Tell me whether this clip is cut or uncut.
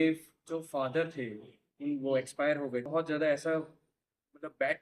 cut